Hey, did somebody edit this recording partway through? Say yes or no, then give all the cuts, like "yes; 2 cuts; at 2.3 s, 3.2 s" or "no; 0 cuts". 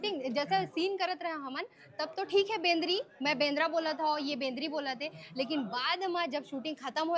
no; 0 cuts